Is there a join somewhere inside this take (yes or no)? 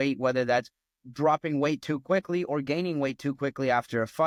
no